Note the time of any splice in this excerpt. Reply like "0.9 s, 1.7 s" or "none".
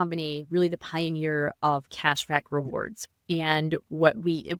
none